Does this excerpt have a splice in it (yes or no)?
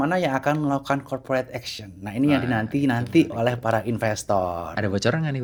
no